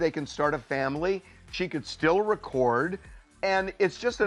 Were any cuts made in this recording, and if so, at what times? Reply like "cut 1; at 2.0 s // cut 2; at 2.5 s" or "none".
none